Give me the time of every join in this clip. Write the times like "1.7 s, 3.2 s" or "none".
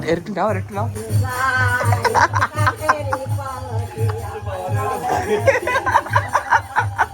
1.0 s